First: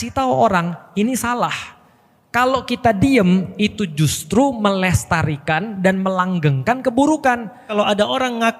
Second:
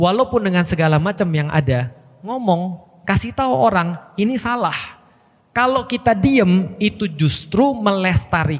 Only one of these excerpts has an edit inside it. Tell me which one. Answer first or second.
first